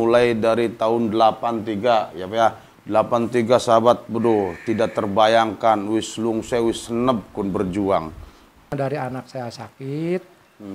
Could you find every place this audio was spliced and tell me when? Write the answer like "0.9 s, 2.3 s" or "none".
8.7 s